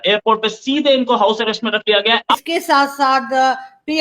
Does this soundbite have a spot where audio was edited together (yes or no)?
yes